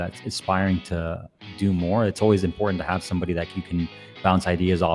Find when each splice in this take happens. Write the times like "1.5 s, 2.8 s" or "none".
none